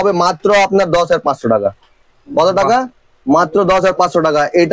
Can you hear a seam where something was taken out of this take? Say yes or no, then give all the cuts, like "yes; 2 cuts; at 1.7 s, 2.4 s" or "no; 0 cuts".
no; 0 cuts